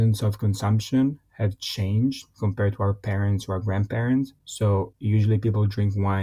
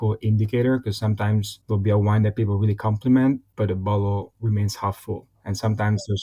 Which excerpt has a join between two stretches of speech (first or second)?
second